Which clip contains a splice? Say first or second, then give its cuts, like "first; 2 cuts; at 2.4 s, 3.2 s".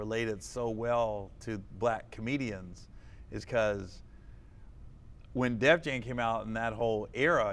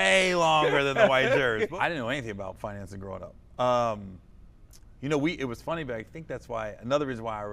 second; 1 cut; at 1.7 s